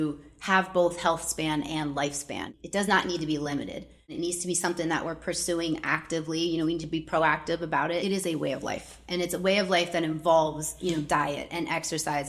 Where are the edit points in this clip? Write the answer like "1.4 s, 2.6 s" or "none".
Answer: 2.5 s, 4.1 s, 8.0 s